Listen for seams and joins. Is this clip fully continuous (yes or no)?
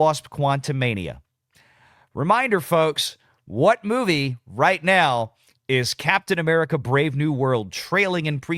yes